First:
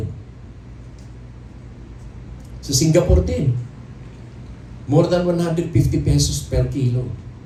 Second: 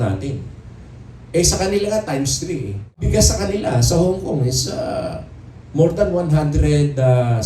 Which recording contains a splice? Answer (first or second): second